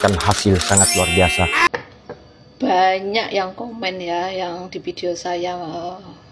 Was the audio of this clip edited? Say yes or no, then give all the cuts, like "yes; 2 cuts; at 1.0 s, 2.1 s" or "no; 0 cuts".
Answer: yes; 1 cut; at 1.7 s